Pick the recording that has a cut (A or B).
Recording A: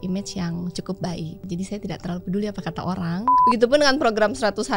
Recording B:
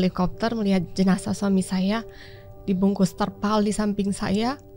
A